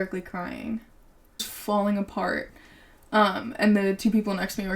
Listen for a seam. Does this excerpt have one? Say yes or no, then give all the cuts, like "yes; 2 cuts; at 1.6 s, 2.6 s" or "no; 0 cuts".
yes; 1 cut; at 1.5 s